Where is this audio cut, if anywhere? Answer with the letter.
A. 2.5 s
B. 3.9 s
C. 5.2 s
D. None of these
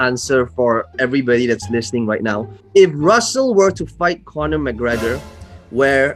A